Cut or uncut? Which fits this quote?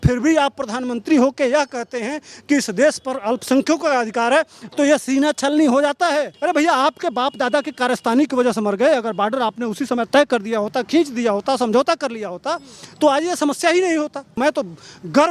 cut